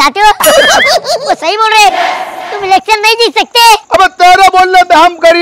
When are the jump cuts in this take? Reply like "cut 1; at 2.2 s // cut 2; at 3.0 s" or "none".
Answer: cut 1; at 1.2 s

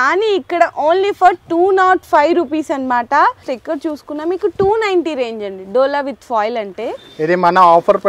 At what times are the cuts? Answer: cut 1; at 3.5 s

